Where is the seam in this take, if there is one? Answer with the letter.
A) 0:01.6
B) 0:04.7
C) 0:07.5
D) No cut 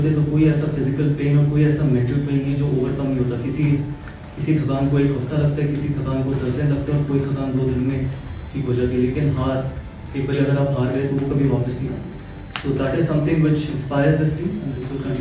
D